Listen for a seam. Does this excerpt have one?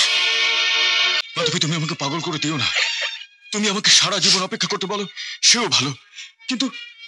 yes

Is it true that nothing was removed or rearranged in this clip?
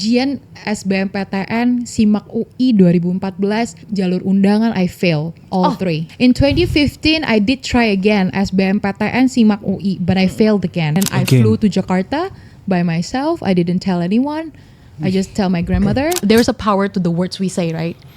no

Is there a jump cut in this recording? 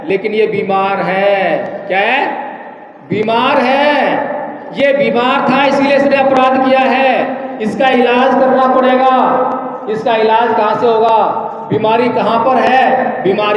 no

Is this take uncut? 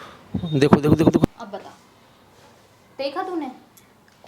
no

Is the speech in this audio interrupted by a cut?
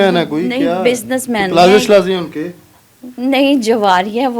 no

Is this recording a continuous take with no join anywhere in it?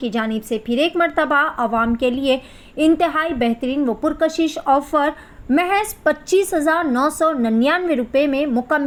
yes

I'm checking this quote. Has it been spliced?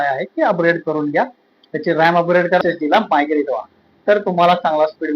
yes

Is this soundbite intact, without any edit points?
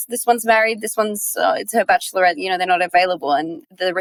yes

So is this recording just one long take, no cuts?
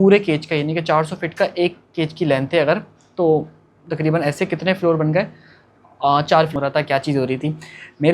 no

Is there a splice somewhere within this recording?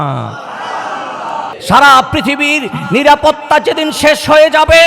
yes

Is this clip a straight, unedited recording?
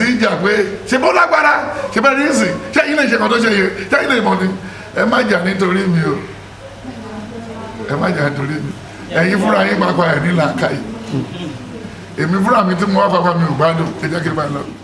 yes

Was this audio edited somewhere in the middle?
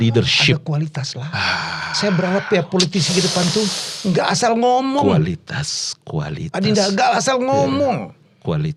no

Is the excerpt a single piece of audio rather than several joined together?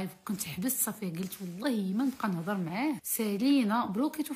no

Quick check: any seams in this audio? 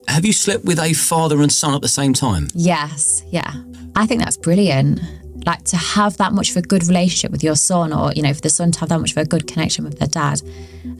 no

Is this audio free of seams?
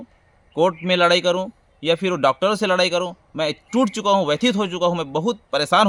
yes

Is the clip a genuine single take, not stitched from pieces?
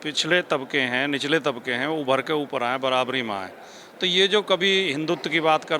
yes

